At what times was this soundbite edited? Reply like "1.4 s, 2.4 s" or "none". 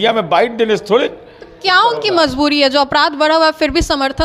none